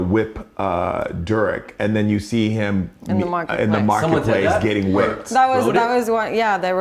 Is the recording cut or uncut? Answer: uncut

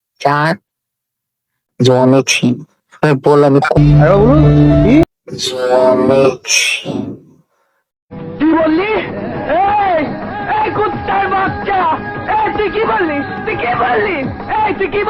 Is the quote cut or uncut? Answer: uncut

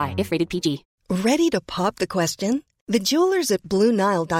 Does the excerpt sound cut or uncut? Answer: cut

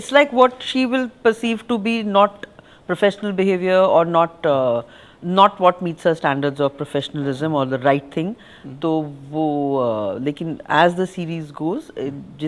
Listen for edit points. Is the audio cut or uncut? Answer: uncut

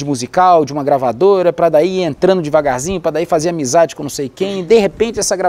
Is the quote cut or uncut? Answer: cut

